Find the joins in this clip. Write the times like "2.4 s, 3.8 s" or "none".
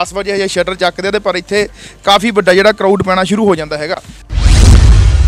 4.2 s